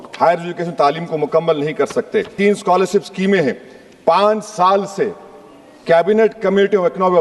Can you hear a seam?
yes; 1 cut; at 2.3 s

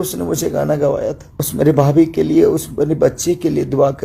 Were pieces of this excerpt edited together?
yes; 1 cut; at 1.3 s

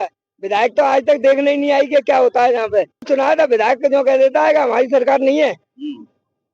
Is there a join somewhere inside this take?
yes; 1 cut; at 3.1 s

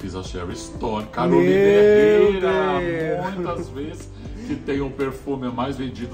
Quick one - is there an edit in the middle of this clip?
no; 0 cuts

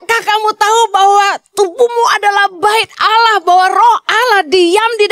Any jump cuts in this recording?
no; 0 cuts

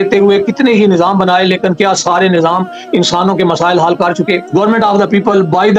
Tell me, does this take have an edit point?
yes; 1 cut; at 4.5 s

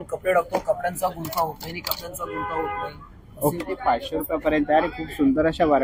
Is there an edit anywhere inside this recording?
yes; 1 cut; at 3.6 s

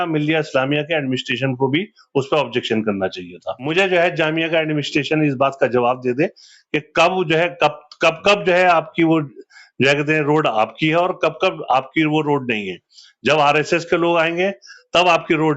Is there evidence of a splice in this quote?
yes; 1 cut; at 3.7 s

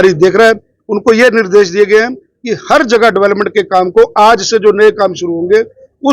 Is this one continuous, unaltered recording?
yes; 0 cuts

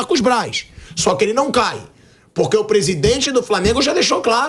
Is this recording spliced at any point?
no; 0 cuts

